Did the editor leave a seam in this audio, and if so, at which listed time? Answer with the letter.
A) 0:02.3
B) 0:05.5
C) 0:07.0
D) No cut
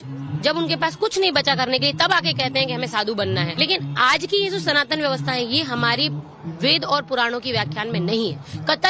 A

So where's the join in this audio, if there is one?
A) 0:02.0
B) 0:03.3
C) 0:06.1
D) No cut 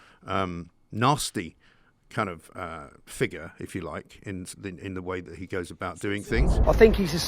C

